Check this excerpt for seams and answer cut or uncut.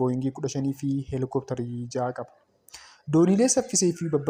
uncut